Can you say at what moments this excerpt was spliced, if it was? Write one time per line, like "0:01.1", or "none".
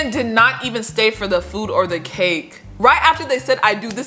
0:02.7